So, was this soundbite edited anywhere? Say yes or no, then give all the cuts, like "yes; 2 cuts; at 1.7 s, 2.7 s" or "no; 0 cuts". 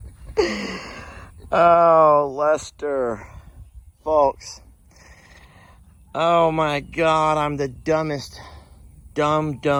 no; 0 cuts